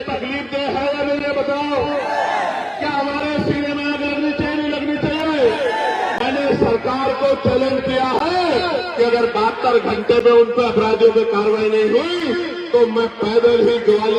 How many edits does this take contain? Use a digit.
0